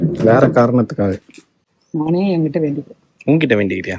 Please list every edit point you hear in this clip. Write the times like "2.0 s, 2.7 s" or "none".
1.8 s